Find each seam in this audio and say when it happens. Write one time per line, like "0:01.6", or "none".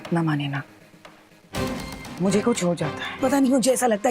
0:03.0